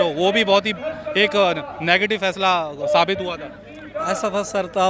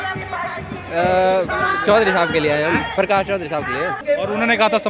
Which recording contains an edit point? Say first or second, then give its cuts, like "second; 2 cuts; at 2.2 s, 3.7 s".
second; 1 cut; at 4.0 s